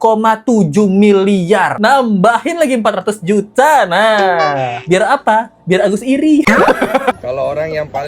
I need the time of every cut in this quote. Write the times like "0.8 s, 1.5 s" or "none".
1.7 s, 7.2 s